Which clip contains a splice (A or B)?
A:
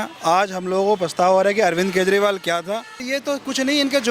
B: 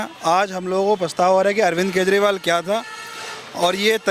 A